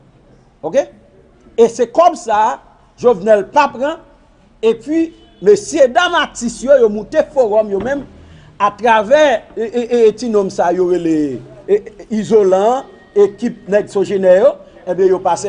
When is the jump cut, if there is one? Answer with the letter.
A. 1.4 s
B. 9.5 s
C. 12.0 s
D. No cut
D